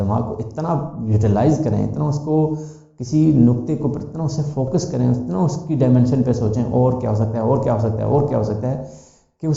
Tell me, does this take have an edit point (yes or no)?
no